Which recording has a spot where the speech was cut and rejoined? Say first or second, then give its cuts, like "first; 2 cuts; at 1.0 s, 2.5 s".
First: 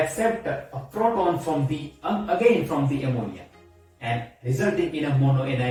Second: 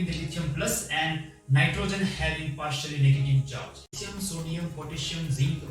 second; 1 cut; at 4.0 s